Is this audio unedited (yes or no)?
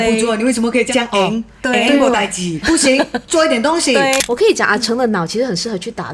no